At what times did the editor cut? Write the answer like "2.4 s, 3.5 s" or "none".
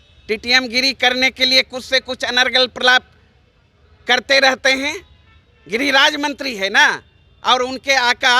none